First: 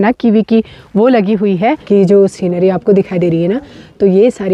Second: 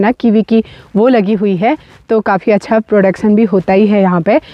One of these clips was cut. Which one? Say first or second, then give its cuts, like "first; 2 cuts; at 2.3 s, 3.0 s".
first; 1 cut; at 1.8 s